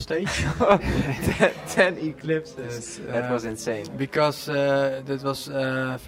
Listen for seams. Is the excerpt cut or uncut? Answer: uncut